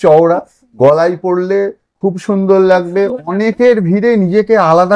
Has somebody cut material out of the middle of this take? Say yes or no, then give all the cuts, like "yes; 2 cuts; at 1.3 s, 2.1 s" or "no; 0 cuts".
no; 0 cuts